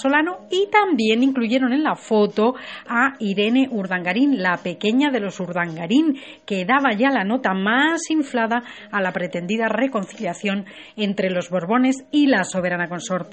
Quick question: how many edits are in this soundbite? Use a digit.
1